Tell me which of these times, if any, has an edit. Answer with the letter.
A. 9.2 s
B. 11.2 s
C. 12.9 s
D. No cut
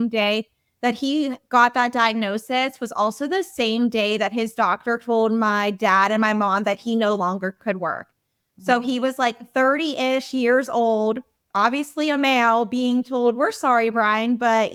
D